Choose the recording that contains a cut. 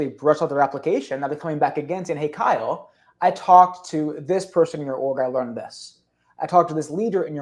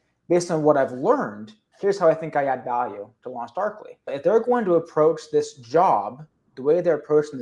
second; 1 cut; at 4.1 s

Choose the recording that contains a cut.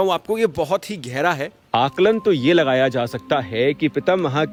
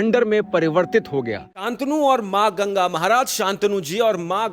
second; 1 cut; at 1.7 s

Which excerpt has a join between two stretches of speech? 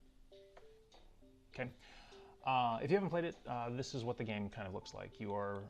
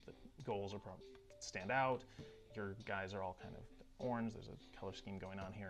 first; 1 cut; at 3.0 s

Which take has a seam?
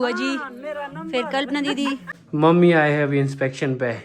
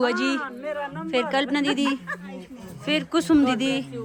first; 1 cut; at 2.2 s

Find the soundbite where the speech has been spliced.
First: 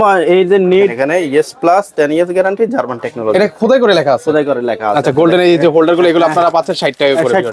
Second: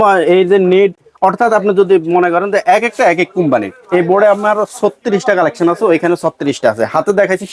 first; 2 cuts; at 1.0 s, 5.1 s

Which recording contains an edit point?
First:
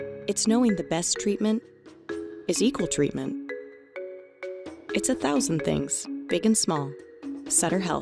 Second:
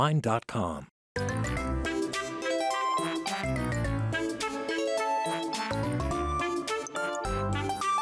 second; 1 cut; at 1.0 s

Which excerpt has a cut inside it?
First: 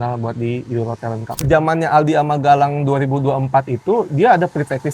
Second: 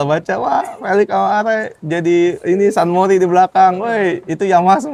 first; 1 cut; at 1.4 s

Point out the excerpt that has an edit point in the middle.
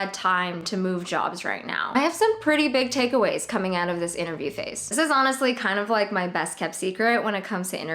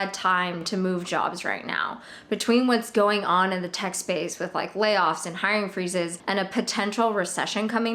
first; 2 cuts; at 1.8 s, 4.8 s

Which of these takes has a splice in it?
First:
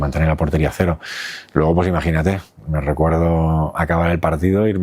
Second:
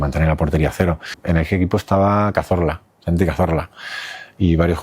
second; 1 cut; at 1.1 s

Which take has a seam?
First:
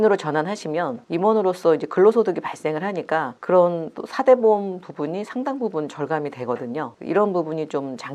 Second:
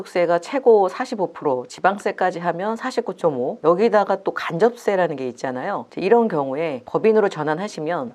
second; 1 cut; at 5.9 s

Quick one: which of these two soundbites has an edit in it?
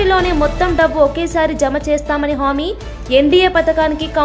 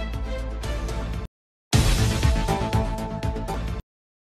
second; 1 cut; at 1.0 s

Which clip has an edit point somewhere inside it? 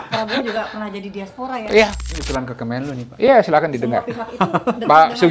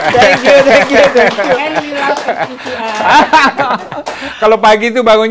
first; 1 cut; at 2.0 s

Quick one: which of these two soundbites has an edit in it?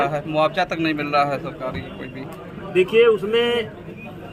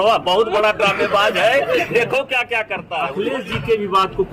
second; 1 cut; at 3.1 s

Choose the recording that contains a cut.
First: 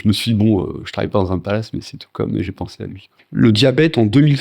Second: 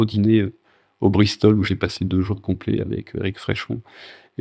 first; 1 cut; at 3.2 s

